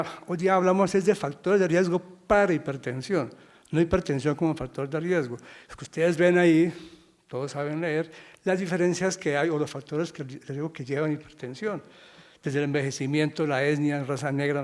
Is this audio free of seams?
yes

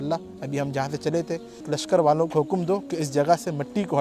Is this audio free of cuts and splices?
no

